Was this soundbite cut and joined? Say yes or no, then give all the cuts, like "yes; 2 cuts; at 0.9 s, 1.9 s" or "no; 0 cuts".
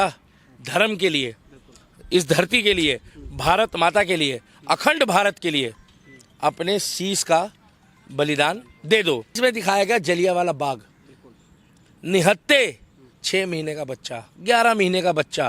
yes; 1 cut; at 9.4 s